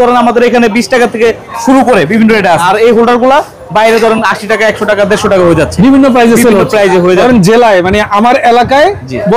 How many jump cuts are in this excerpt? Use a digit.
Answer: 2